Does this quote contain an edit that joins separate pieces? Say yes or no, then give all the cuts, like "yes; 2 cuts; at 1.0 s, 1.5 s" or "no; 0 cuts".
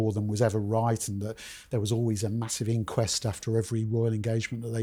no; 0 cuts